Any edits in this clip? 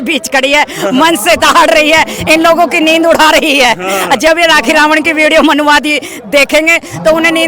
no; 0 cuts

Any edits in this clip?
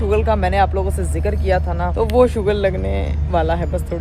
yes; 1 cut; at 1.9 s

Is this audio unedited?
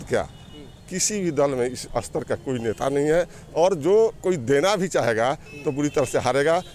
yes; 0 cuts

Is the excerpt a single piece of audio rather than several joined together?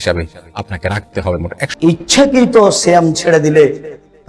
no; 1 cut; at 1.7 s

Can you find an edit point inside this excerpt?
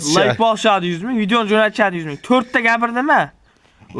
no; 0 cuts

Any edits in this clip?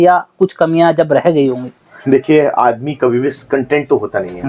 no; 0 cuts

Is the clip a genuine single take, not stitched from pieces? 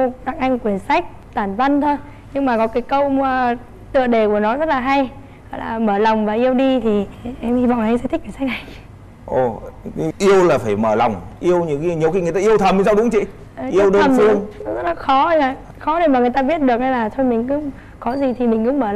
yes; 0 cuts

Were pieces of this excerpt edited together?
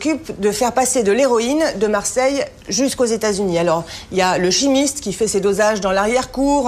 yes; 1 cut; at 2.9 s

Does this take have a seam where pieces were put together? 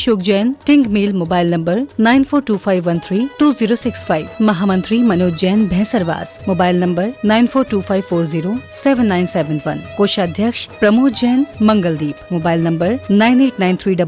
no; 0 cuts

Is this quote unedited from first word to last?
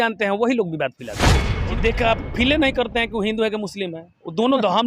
no; 1 cut; at 1.5 s

